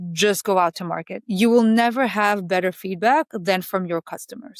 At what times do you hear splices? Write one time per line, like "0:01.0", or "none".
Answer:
none